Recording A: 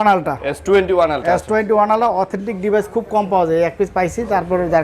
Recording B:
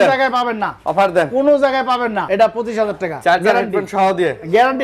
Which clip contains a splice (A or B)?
B